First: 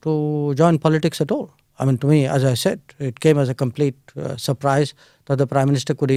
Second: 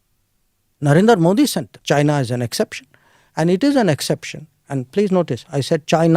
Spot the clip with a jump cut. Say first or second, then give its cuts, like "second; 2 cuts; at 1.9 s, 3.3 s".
second; 1 cut; at 1.7 s